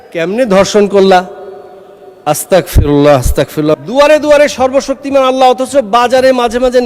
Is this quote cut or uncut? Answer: cut